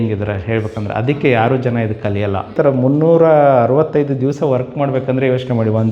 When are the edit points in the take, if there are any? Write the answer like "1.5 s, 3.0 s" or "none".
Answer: 2.5 s